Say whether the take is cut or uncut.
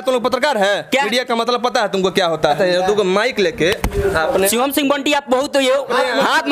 cut